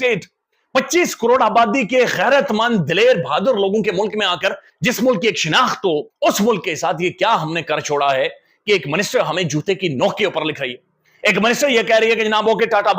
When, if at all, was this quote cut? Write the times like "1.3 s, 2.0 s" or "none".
4.7 s, 6.1 s